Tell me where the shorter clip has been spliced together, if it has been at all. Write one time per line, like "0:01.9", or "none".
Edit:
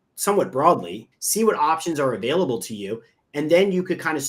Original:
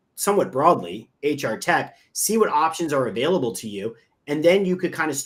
0:01.1